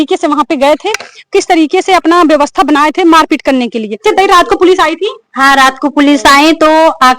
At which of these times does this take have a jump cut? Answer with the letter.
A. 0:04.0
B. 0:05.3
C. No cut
A